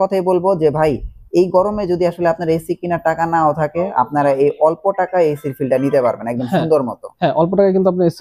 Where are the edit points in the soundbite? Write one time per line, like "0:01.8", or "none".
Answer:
none